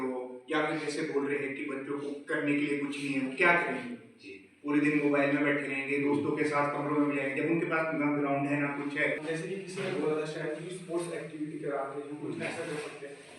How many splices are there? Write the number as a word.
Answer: one